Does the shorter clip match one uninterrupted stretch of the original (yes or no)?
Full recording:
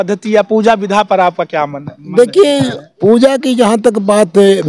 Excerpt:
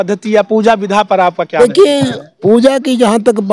no